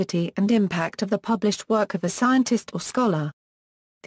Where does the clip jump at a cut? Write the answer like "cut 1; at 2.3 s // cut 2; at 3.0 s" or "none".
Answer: cut 1; at 0.9 s